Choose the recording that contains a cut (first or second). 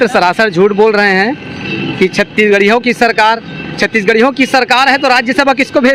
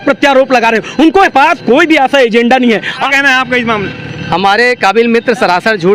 second